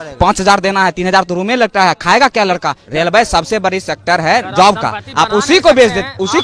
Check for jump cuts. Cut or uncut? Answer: cut